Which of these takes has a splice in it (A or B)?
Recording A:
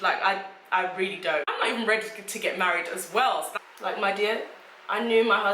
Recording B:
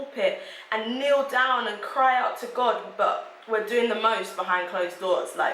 A